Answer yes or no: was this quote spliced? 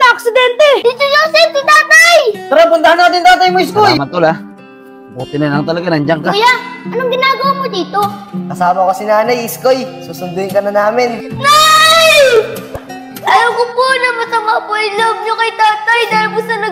yes